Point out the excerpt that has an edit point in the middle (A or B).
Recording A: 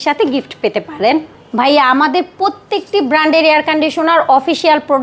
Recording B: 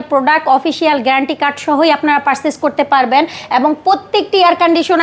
A